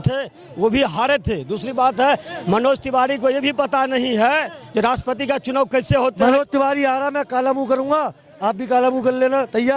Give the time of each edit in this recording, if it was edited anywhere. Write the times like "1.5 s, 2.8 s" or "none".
6.2 s